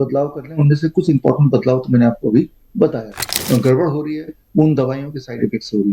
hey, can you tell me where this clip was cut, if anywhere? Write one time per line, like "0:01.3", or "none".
0:03.3